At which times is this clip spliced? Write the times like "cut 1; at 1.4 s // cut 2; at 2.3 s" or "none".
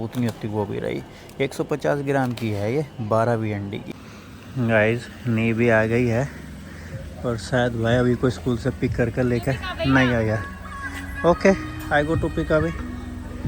cut 1; at 3.9 s